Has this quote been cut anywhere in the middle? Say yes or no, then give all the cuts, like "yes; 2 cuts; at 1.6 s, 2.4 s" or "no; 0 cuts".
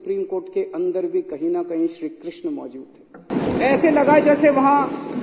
yes; 1 cut; at 3.3 s